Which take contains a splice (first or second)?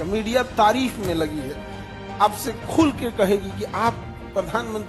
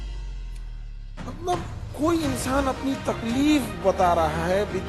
second